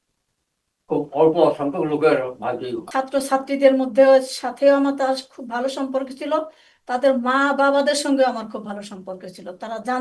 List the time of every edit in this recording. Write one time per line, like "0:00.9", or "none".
0:02.9